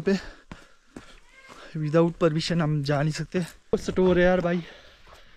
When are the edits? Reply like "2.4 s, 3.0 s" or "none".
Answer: 3.6 s